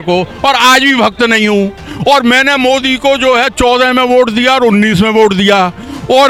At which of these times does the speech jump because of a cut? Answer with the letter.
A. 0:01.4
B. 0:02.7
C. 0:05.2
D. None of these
D